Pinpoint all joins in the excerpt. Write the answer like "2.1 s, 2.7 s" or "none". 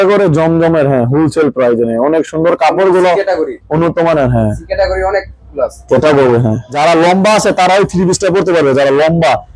6.7 s

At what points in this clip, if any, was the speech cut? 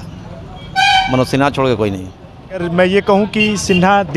2.6 s

